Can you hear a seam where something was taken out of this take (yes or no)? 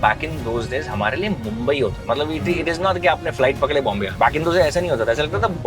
yes